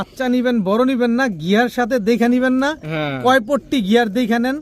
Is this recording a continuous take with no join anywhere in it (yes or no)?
yes